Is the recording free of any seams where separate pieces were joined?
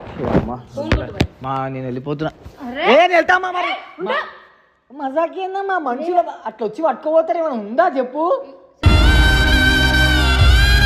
yes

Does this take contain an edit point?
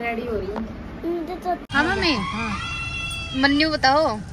yes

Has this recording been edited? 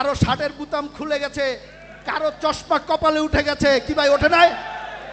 no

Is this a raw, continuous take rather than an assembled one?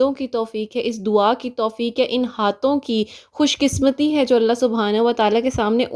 yes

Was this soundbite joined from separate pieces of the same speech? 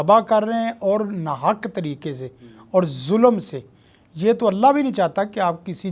no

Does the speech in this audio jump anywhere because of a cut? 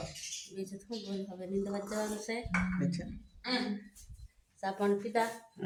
no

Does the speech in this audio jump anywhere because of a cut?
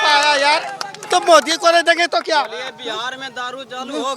no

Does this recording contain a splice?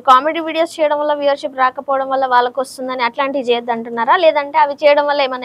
no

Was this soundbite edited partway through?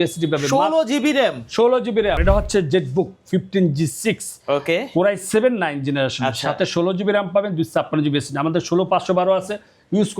yes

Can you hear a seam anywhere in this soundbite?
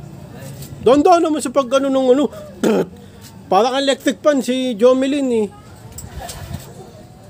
no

